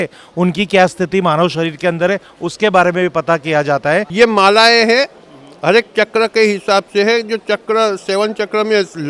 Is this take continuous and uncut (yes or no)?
no